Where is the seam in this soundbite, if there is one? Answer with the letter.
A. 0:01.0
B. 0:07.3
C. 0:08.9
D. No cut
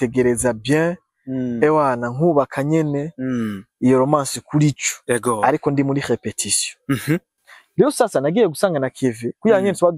D